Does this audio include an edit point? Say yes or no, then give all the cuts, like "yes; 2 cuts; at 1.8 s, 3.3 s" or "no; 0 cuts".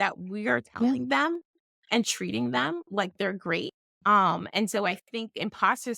yes; 1 cut; at 3.9 s